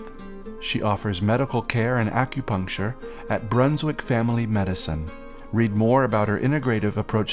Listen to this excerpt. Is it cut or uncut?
uncut